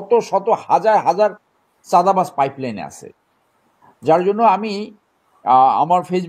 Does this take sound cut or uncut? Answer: uncut